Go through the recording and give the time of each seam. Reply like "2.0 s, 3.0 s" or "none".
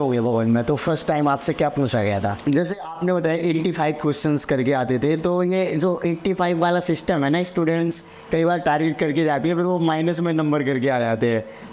2.4 s